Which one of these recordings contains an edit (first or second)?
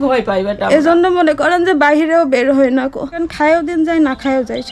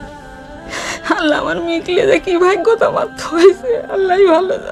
first